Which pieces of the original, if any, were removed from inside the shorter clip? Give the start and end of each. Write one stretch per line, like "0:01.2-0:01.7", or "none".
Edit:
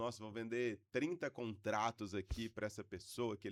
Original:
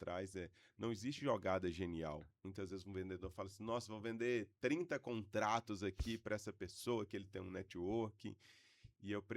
none